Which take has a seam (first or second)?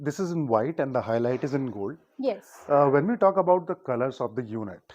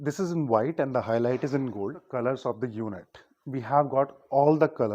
second